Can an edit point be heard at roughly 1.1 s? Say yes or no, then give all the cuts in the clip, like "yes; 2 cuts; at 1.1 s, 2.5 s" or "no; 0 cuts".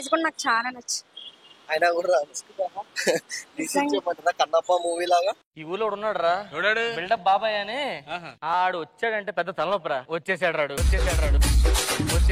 no; 0 cuts